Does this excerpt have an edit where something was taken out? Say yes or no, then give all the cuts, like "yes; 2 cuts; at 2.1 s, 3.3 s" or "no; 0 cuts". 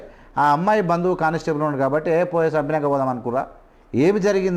no; 0 cuts